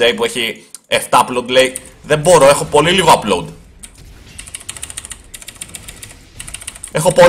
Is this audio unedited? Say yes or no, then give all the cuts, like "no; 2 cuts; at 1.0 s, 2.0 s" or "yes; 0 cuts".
yes; 0 cuts